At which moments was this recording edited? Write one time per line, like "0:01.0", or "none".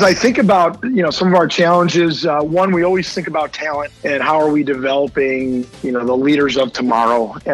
0:03.9
0:05.7